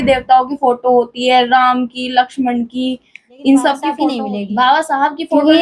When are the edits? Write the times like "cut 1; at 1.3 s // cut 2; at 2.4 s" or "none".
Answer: cut 1; at 4.0 s